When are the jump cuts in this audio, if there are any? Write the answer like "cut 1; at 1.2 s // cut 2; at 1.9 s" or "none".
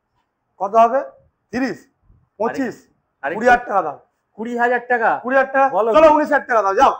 none